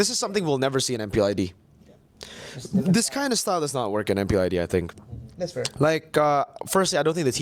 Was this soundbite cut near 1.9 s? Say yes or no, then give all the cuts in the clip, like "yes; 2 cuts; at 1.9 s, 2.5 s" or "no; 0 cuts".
no; 0 cuts